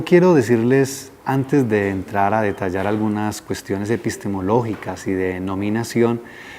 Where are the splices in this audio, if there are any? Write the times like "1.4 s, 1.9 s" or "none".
2.6 s